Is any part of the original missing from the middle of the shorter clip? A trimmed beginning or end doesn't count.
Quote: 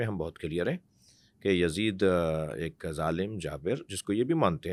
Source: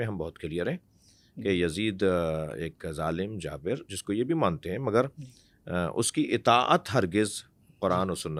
no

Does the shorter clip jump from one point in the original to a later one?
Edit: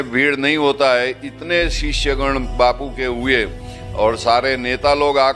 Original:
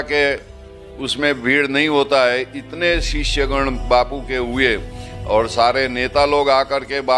no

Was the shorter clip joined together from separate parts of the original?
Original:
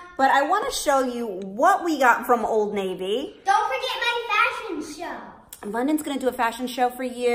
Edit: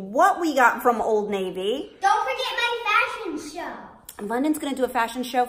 no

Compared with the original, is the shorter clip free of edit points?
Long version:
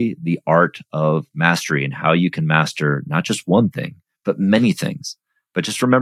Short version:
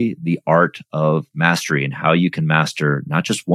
yes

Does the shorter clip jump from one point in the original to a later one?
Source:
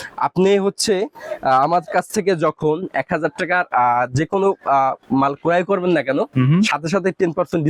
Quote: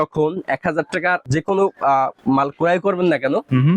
yes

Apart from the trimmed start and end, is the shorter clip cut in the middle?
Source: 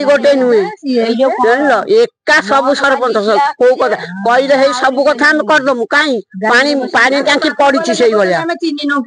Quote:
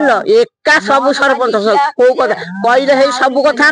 no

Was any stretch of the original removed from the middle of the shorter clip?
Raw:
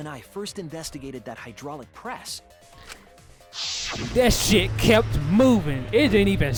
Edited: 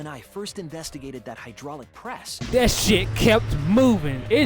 yes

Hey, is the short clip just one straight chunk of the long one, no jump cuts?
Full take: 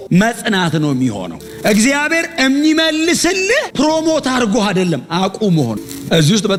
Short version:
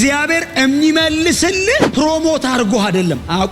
yes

